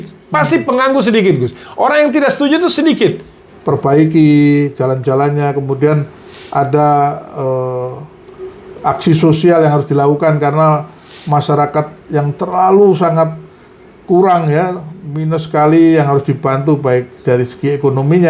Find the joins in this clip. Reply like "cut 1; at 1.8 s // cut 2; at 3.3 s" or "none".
cut 1; at 3.3 s